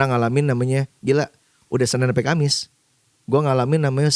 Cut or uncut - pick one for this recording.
uncut